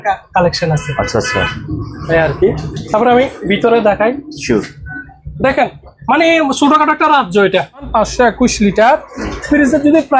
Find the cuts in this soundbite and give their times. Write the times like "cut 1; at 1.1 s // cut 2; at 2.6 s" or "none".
cut 1; at 7.9 s